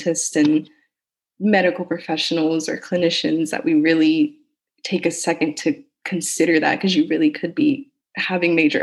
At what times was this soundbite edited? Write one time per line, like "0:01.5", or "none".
none